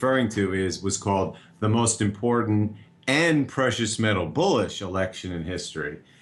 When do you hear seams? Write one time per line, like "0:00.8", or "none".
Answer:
0:03.0